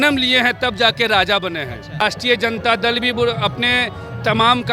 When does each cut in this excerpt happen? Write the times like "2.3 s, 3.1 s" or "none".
2.0 s